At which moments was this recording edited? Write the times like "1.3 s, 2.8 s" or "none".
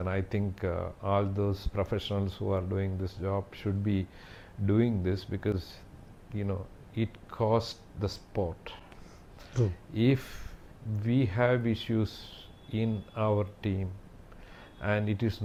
none